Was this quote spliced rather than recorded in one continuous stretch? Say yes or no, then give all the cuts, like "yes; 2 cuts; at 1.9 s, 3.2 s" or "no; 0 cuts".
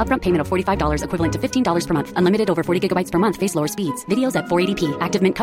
no; 0 cuts